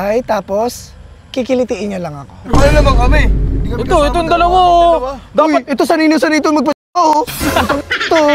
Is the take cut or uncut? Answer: uncut